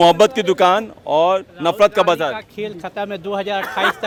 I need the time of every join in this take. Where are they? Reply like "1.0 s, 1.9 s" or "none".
none